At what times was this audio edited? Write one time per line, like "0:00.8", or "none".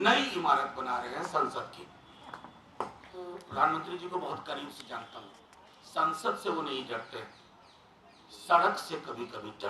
0:03.4